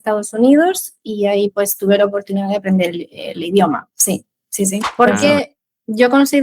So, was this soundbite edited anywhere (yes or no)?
yes